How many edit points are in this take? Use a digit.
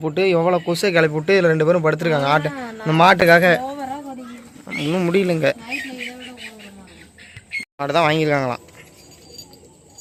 0